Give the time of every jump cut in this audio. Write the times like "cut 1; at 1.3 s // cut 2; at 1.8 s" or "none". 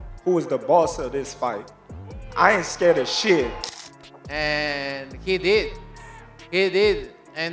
cut 1; at 3.6 s